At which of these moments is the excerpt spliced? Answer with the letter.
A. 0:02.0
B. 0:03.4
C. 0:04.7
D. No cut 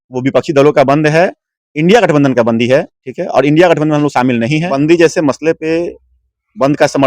C